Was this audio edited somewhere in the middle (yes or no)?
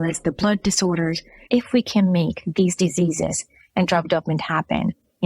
yes